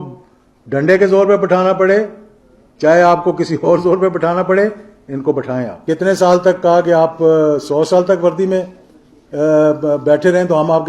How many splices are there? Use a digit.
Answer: 1